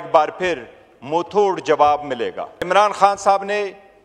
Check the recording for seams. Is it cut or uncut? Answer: cut